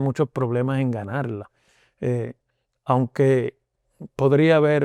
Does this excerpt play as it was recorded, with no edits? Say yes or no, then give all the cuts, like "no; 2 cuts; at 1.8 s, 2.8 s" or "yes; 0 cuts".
yes; 0 cuts